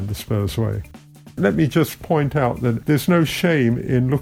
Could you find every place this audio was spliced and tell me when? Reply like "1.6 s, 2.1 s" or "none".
1.4 s, 2.8 s

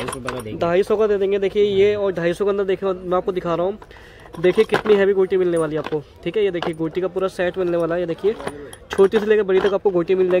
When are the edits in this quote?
none

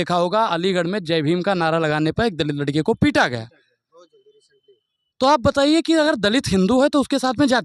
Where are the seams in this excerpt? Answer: none

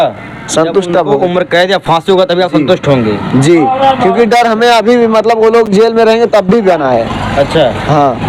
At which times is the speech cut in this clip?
none

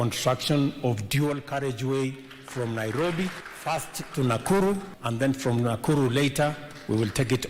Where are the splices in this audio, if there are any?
3.5 s, 5.0 s

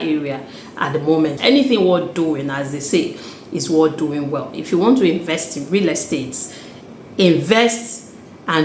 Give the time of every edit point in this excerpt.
1.4 s

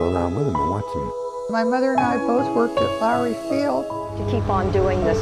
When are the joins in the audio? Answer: none

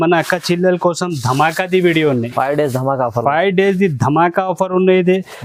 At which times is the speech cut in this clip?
none

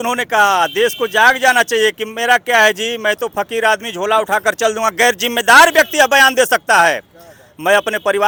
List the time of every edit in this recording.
none

